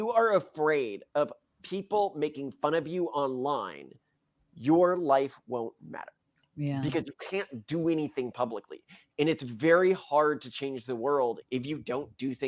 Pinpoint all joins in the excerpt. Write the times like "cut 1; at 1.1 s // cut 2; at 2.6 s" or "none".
cut 1; at 11.4 s